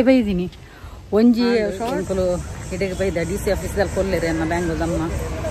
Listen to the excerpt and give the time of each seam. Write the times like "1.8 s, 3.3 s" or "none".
1.7 s